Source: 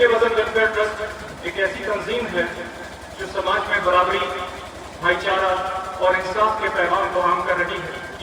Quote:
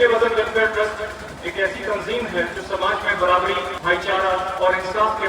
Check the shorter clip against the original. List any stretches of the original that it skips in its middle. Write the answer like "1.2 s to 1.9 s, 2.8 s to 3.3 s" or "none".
2.6 s to 3.2 s, 4.4 s to 4.9 s, 5.7 s to 5.9 s